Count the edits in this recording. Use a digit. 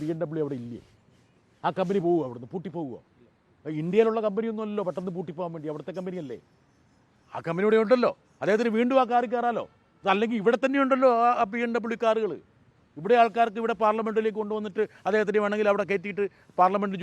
0